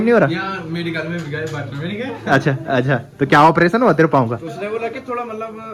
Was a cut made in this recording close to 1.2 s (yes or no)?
no